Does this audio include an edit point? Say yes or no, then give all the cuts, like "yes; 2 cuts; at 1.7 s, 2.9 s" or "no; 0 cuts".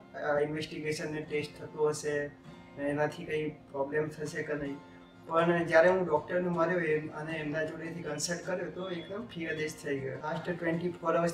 yes; 1 cut; at 10.4 s